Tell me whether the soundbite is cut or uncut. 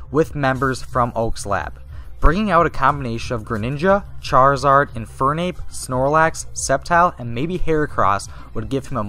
cut